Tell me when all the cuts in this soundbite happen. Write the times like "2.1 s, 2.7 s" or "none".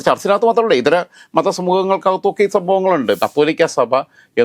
3.2 s